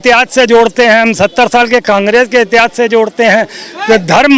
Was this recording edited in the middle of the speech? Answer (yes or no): no